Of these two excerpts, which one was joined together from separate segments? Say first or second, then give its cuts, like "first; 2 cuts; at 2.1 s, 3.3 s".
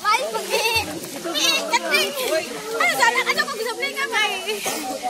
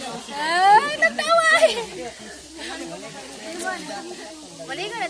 first; 1 cut; at 3.9 s